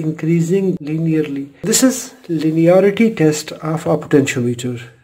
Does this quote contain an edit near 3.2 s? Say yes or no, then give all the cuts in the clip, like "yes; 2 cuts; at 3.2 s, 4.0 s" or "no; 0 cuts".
no; 1 cut; at 1.5 s